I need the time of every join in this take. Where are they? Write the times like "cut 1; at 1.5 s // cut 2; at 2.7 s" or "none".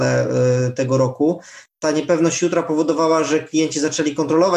cut 1; at 1.7 s

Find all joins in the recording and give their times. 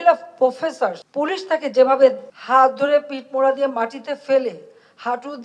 cut 1; at 1.0 s // cut 2; at 2.3 s

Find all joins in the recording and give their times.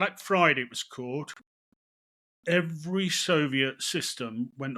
none

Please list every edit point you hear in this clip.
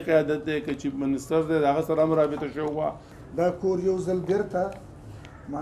cut 1; at 3.2 s

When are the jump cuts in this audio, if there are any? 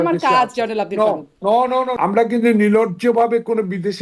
cut 1; at 1.9 s

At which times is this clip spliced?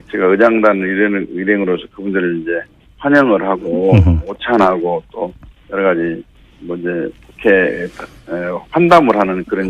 cut 1; at 6.0 s

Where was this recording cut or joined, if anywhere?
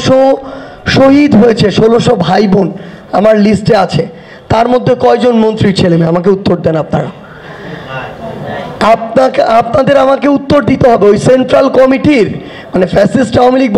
none

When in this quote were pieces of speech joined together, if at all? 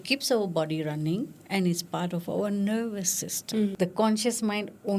cut 1; at 3.7 s

